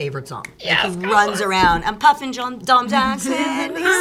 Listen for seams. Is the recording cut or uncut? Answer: uncut